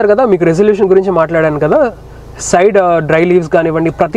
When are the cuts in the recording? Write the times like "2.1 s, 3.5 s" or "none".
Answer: none